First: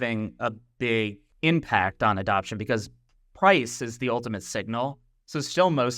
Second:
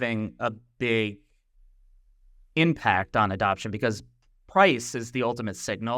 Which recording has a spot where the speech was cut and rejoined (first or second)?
first